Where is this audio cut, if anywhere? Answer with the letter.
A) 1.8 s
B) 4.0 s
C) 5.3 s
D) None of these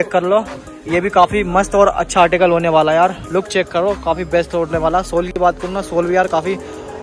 D